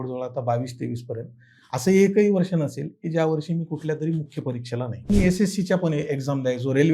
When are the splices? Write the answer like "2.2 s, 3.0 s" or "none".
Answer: 5.1 s